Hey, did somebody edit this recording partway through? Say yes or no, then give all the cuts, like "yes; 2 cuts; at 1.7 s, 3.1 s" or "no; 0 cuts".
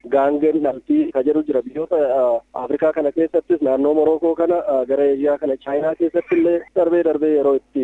yes; 1 cut; at 1.1 s